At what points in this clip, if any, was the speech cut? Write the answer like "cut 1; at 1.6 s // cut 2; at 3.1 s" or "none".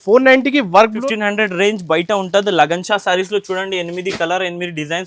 cut 1; at 1.0 s